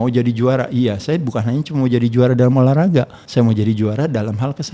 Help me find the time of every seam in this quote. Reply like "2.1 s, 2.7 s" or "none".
3.2 s